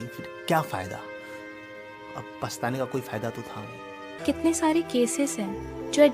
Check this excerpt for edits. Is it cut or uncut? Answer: cut